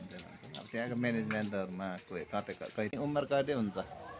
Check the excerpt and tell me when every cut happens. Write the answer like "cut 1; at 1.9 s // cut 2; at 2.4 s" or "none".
cut 1; at 3.0 s

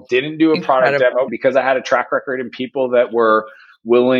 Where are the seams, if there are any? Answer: cut 1; at 1.3 s

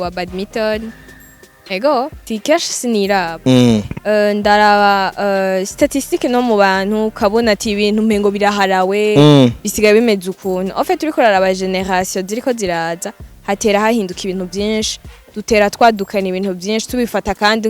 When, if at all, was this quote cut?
cut 1; at 2.2 s

